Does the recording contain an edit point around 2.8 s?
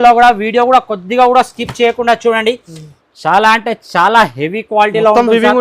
yes; 1 cut; at 2.8 s

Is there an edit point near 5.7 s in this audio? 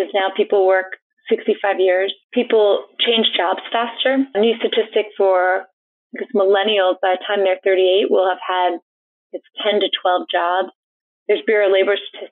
no; 0 cuts

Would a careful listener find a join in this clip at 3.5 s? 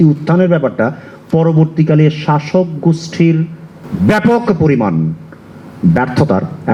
no; 0 cuts

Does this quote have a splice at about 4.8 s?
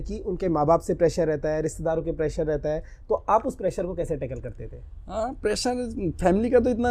no; 0 cuts

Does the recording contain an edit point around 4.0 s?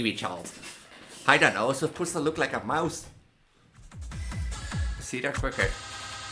yes; 1 cut; at 4.0 s

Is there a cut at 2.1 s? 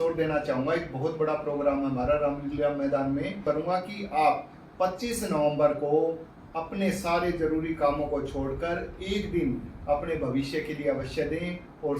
no; 1 cut; at 3.4 s

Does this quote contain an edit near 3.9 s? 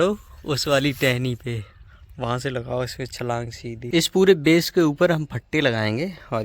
yes; 1 cut; at 3.9 s

